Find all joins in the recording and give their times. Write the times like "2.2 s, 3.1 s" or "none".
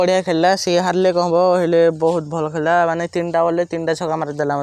none